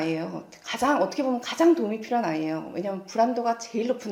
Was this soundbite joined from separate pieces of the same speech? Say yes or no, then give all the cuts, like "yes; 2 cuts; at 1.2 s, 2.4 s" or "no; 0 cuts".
no; 0 cuts